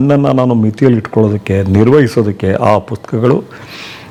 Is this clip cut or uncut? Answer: uncut